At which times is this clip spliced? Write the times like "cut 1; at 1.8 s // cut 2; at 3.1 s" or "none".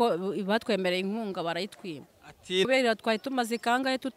cut 1; at 2.7 s